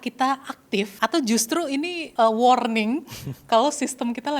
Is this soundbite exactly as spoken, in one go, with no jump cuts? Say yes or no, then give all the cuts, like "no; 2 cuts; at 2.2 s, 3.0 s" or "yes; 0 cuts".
no; 2 cuts; at 0.9 s, 2.0 s